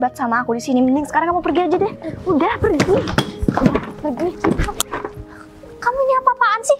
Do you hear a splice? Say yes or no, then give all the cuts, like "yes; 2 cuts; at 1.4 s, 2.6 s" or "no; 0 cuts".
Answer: no; 0 cuts